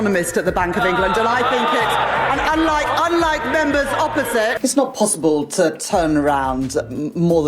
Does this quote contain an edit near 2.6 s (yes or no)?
no